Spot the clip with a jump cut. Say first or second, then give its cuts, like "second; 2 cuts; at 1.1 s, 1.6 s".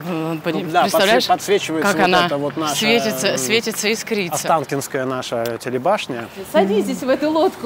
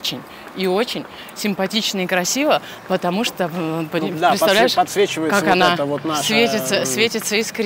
first; 1 cut; at 6.4 s